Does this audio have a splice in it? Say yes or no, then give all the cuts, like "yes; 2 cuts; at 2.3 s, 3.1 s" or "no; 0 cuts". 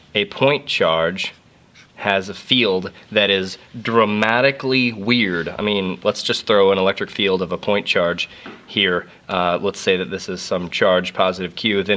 no; 0 cuts